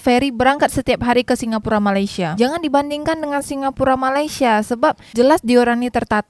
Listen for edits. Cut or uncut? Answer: cut